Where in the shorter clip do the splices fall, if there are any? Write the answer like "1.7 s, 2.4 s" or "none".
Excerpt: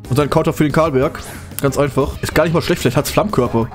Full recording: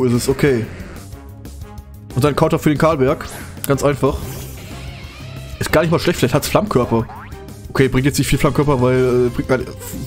2.2 s